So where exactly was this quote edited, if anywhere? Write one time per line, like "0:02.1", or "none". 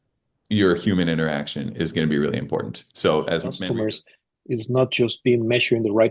0:03.5